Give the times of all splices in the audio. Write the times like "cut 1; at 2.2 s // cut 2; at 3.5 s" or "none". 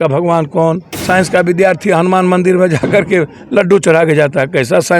cut 1; at 0.9 s

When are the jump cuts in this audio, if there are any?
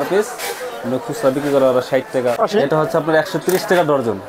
cut 1; at 2.4 s

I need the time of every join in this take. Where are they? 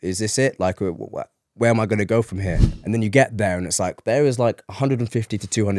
cut 1; at 2.6 s

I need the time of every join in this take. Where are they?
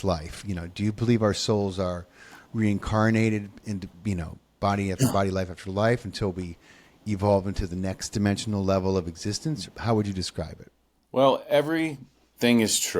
cut 1; at 9.6 s

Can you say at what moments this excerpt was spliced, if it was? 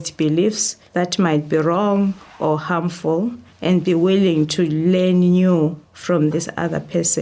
none

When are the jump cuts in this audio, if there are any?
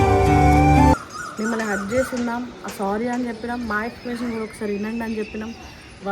cut 1; at 1.2 s

